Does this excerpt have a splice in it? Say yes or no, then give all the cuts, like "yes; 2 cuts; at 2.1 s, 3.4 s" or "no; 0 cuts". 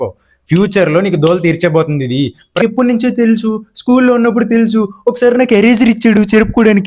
yes; 1 cut; at 2.6 s